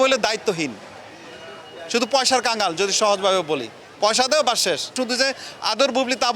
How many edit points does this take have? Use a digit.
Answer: 1